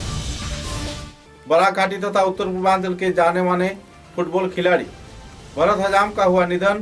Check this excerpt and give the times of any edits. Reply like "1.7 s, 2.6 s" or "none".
1.1 s